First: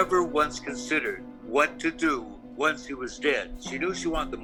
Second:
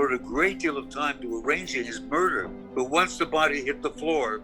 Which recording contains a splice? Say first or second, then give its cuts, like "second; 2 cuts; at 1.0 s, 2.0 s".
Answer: second; 1 cut; at 2.5 s